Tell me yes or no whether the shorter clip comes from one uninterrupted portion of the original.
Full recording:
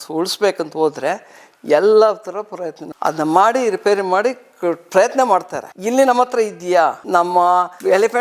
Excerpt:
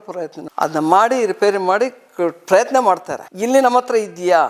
yes